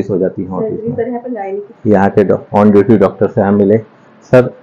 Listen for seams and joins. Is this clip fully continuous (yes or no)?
no